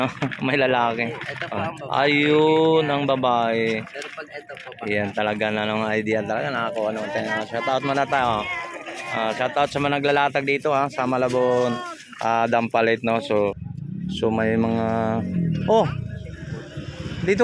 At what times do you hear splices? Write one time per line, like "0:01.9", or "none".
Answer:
0:13.5

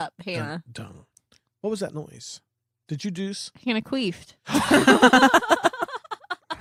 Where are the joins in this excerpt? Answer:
none

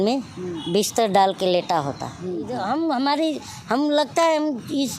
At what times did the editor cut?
0:02.5

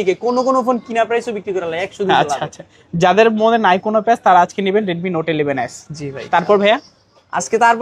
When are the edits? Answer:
none

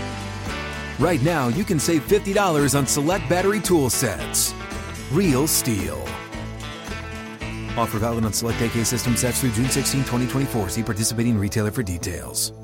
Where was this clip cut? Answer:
none

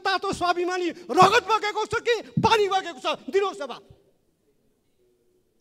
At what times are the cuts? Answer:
none

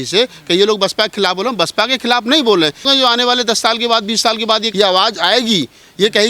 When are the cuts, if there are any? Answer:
0:02.9
0:04.7

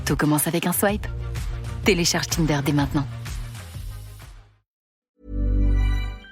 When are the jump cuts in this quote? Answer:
0:05.1

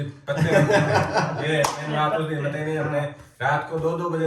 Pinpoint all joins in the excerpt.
none

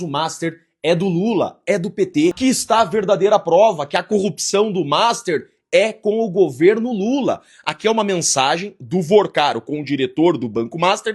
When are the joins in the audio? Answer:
0:02.4

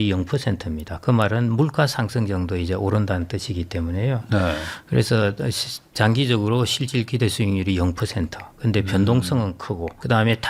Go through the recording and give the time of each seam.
none

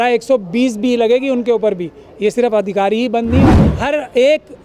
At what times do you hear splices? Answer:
0:03.7

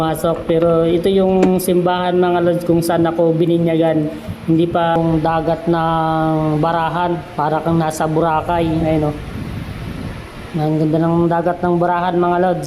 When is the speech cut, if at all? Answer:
0:05.0

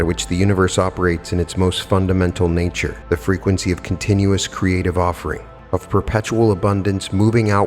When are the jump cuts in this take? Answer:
0:02.9
0:05.5

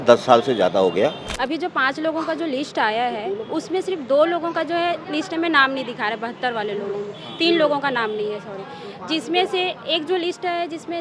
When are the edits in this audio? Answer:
0:01.3

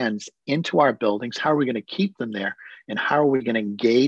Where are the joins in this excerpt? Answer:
none

